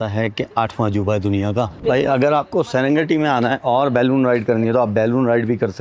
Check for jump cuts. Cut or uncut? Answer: uncut